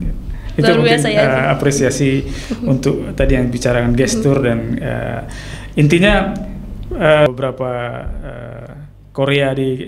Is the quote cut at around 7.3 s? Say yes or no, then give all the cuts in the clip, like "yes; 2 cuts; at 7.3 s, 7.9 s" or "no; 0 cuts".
yes; 1 cut; at 7.3 s